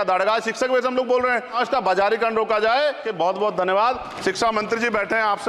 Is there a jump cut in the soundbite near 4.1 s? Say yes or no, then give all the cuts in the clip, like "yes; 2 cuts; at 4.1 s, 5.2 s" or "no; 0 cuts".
yes; 3 cuts; at 1.6 s, 3.0 s, 4.1 s